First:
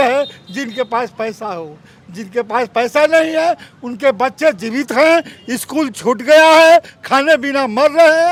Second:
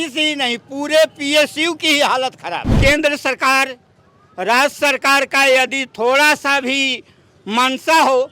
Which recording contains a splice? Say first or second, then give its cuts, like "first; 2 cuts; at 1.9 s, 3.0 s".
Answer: second; 1 cut; at 2.7 s